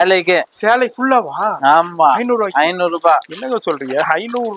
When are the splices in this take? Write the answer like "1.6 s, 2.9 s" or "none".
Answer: none